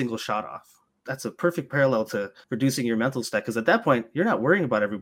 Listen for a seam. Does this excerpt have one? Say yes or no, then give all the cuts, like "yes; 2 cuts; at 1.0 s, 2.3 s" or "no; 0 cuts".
yes; 2 cuts; at 1.0 s, 2.4 s